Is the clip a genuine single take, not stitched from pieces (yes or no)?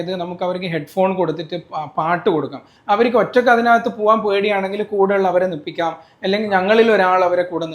no